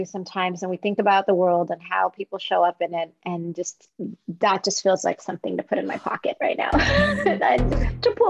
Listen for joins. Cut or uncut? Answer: uncut